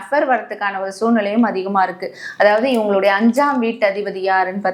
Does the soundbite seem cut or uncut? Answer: uncut